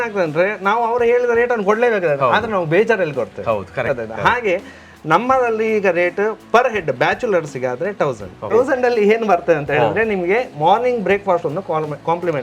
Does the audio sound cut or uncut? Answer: cut